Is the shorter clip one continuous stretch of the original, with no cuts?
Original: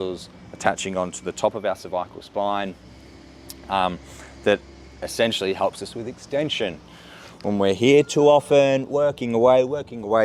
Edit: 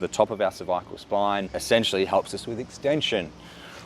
no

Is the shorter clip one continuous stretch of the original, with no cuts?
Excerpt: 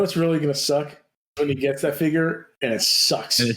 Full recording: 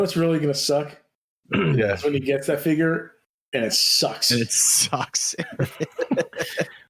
no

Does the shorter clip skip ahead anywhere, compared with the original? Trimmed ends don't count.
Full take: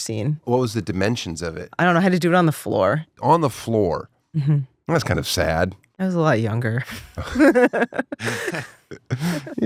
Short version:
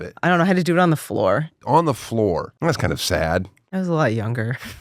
yes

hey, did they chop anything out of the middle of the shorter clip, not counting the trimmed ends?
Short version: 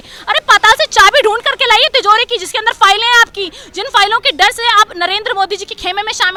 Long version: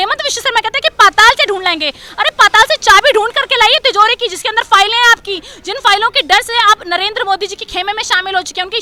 no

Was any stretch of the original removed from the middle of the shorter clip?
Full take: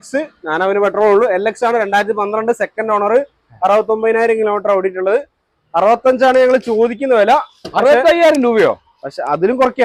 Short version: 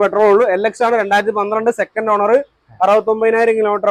no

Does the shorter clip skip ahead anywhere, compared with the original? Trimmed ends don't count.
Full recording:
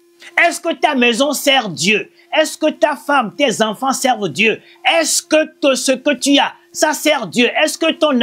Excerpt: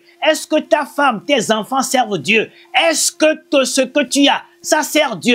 no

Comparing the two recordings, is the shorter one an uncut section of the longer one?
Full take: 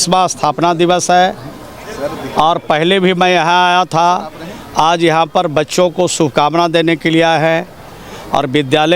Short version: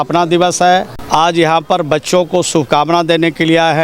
no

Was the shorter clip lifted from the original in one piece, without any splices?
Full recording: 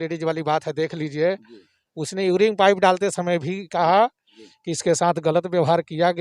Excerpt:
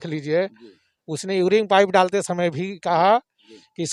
yes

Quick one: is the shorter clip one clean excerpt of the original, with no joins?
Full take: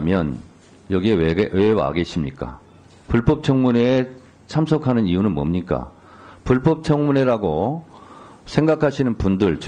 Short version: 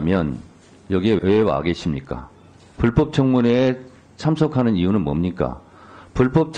no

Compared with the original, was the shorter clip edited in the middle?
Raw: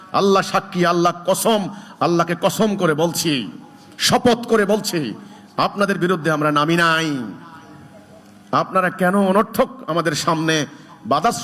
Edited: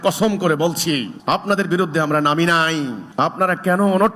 yes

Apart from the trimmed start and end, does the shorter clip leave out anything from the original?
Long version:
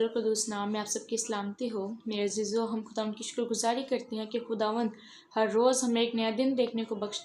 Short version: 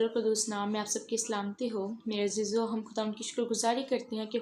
no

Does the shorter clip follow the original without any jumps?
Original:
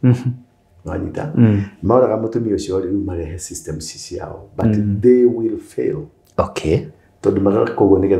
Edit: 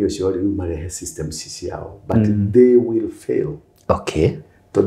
yes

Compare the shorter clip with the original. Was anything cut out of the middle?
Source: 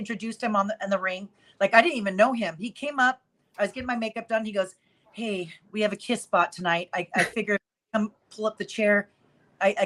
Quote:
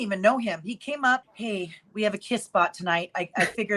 yes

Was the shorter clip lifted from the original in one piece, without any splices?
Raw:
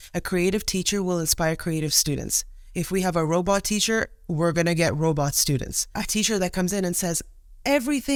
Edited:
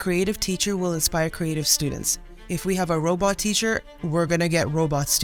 yes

